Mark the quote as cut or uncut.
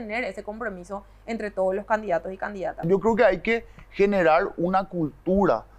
cut